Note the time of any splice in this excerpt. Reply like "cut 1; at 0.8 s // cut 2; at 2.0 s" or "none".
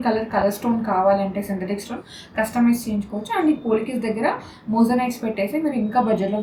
none